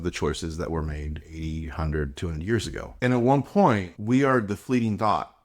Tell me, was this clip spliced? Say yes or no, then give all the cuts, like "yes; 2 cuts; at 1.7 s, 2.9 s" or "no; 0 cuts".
yes; 2 cuts; at 2.9 s, 3.9 s